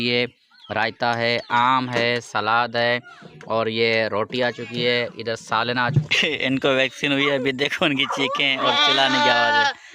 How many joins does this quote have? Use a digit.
1